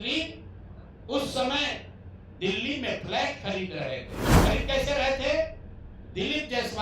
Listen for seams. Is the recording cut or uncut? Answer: cut